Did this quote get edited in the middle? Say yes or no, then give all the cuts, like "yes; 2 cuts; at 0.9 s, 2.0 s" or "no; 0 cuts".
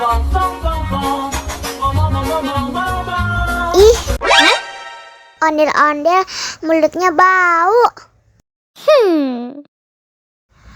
yes; 1 cut; at 3.7 s